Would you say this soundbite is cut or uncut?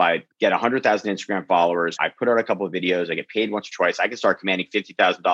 cut